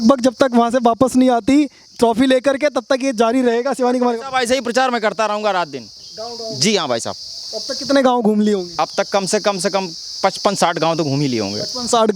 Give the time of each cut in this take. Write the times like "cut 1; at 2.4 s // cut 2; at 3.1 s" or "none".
none